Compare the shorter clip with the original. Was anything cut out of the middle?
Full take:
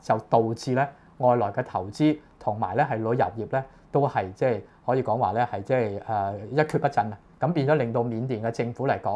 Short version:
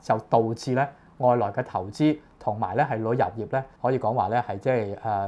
yes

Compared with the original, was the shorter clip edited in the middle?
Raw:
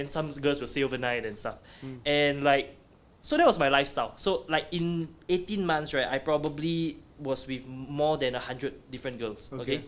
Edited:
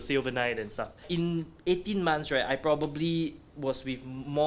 yes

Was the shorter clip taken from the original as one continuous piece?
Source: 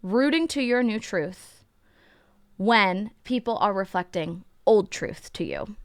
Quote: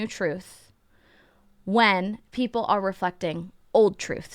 yes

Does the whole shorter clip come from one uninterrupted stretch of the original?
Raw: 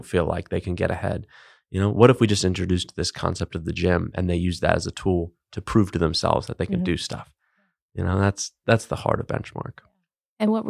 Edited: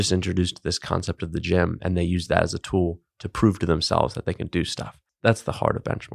no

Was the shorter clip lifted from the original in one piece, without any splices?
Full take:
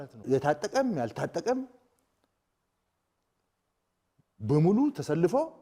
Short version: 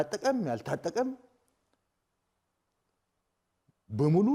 yes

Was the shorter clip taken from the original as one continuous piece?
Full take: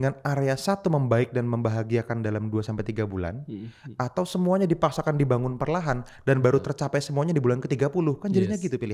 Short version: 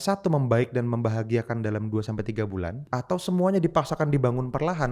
no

